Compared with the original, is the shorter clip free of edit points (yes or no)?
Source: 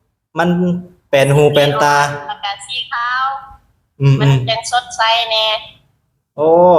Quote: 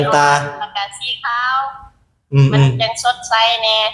yes